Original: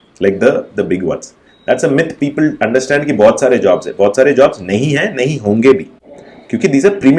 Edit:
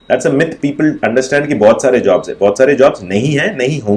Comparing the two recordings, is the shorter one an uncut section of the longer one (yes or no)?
yes